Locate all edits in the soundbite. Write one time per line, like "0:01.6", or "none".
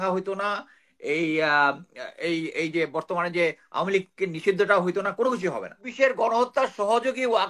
0:05.9